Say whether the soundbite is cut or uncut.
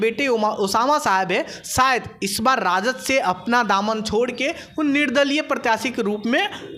uncut